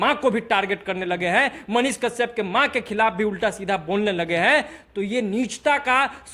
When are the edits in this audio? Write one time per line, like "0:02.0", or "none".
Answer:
none